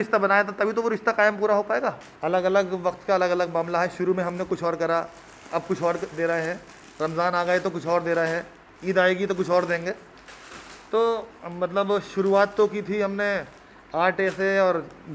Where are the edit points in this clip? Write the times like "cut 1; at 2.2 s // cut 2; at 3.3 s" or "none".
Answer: cut 1; at 2.1 s

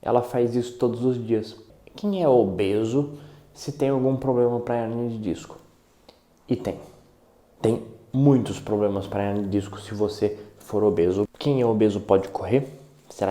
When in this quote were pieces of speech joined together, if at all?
cut 1; at 1.6 s // cut 2; at 11.3 s

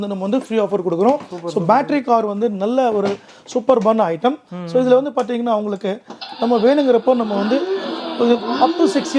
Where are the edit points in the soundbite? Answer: none

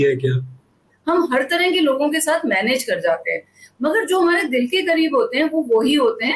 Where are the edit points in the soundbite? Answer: cut 1; at 0.9 s

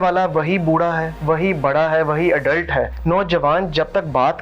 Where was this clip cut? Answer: cut 1; at 1.1 s // cut 2; at 3.0 s

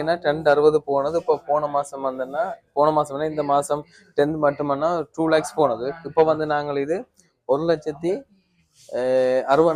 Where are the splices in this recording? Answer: none

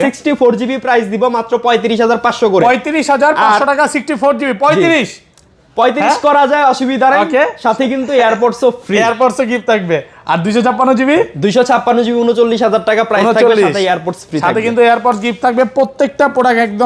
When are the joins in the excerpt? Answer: none

